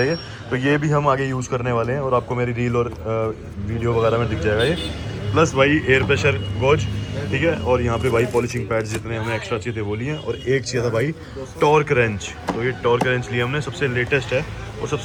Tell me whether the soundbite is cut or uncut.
uncut